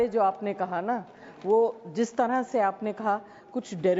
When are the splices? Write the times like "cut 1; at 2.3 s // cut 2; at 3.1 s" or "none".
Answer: none

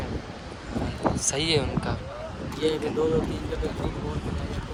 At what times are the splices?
none

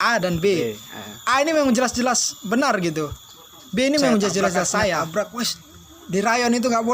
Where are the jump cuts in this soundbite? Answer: cut 1; at 5.1 s

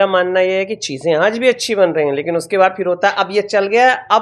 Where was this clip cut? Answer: none

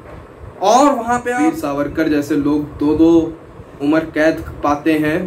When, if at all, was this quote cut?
cut 1; at 1.4 s

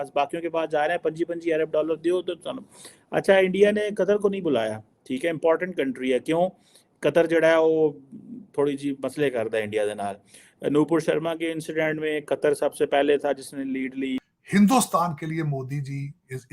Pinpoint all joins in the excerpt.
cut 1; at 14.3 s

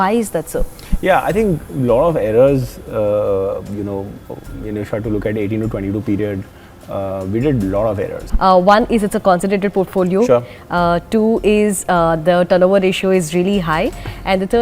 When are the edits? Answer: cut 1; at 8.2 s

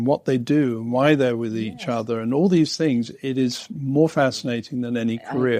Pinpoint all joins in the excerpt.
none

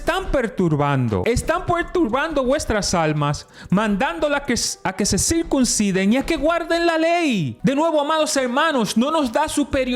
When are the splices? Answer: cut 1; at 1.2 s // cut 2; at 7.5 s

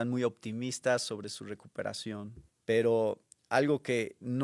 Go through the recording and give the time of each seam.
cut 1; at 2.4 s

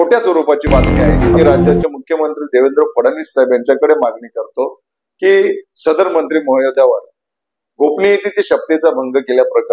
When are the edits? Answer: cut 1; at 1.3 s

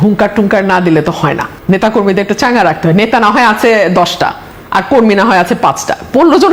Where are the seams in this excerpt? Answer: none

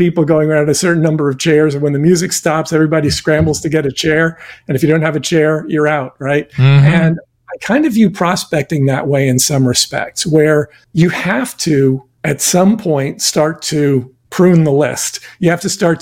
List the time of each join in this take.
cut 1; at 10.8 s // cut 2; at 12.1 s // cut 3; at 14.2 s

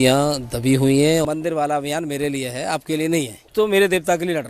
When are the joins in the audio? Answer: cut 1; at 1.2 s // cut 2; at 3.5 s

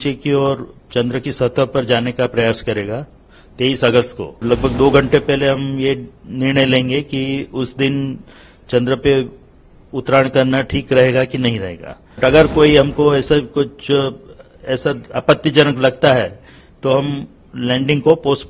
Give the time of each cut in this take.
cut 1; at 4.4 s // cut 2; at 12.2 s

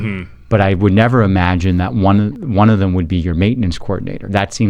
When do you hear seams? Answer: cut 1; at 2.4 s

